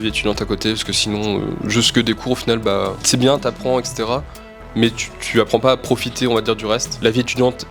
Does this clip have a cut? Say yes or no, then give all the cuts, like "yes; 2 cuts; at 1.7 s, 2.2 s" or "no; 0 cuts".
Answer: no; 0 cuts